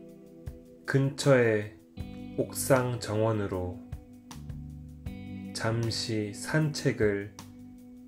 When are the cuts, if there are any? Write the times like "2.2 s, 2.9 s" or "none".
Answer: none